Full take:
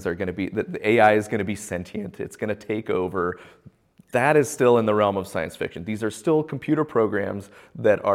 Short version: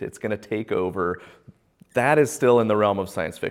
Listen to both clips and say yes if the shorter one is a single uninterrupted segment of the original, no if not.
yes